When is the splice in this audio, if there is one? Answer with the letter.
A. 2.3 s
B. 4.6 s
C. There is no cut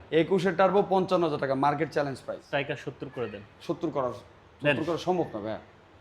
A